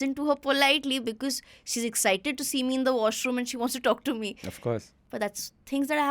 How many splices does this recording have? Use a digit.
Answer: 1